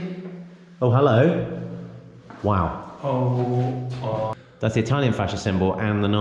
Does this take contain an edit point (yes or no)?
yes